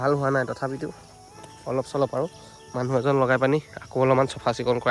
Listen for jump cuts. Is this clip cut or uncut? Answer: uncut